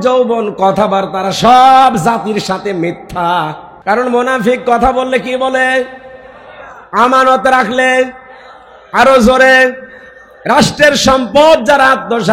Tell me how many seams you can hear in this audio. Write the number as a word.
one